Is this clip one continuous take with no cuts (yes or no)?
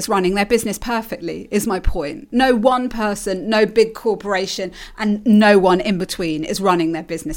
yes